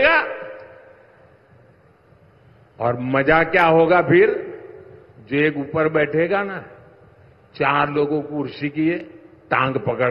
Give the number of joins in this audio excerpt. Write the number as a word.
zero